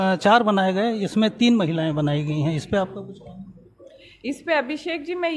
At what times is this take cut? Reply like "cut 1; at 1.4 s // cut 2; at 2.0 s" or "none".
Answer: none

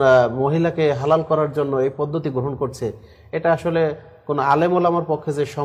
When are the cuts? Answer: none

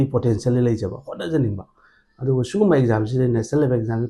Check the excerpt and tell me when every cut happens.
none

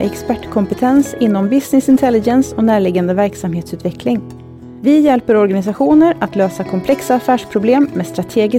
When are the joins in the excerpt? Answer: none

